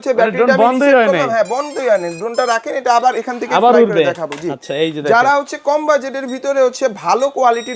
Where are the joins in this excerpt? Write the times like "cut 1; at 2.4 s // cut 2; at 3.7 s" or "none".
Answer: none